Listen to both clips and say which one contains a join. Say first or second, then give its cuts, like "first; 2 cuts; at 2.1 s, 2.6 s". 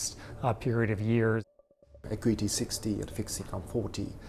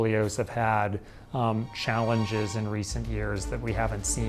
first; 1 cut; at 1.6 s